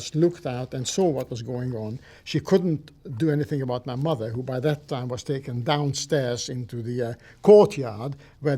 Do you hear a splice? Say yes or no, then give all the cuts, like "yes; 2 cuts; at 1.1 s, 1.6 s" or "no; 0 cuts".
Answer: no; 0 cuts